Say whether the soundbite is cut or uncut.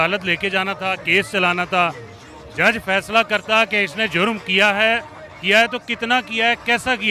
uncut